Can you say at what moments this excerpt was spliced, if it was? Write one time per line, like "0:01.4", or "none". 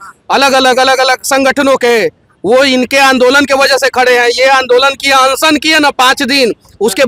none